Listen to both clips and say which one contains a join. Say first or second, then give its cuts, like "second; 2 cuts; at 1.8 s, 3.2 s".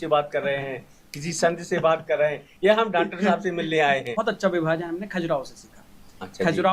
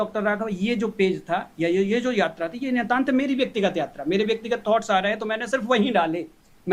first; 1 cut; at 4.1 s